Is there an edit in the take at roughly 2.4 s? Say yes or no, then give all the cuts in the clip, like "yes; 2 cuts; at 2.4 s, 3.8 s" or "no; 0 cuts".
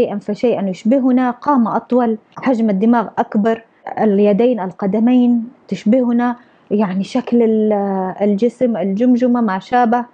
yes; 2 cuts; at 2.4 s, 3.7 s